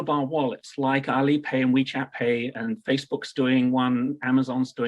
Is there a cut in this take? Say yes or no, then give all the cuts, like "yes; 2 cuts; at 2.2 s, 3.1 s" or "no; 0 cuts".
no; 0 cuts